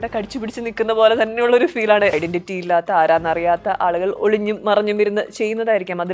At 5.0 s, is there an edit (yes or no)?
no